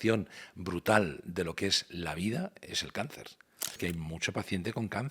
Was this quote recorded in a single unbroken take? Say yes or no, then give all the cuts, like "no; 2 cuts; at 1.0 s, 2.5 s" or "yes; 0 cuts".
no; 1 cut; at 3.8 s